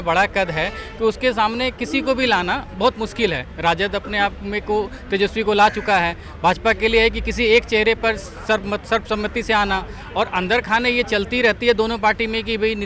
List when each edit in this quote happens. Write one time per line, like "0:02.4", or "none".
none